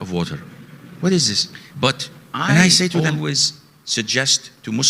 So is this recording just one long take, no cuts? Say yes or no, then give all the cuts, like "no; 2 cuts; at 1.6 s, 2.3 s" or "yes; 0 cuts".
no; 1 cut; at 3.2 s